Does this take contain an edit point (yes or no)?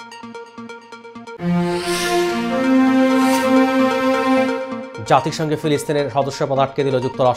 yes